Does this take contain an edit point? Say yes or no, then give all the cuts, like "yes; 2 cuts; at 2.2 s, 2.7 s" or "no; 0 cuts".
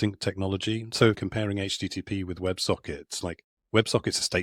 yes; 1 cut; at 1.2 s